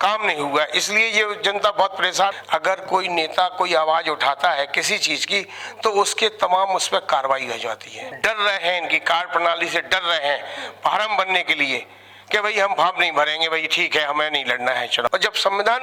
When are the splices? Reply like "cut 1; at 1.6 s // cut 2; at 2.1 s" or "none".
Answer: cut 1; at 2.3 s // cut 2; at 8.0 s // cut 3; at 15.1 s